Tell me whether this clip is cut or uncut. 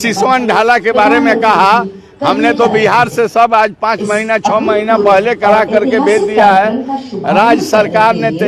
uncut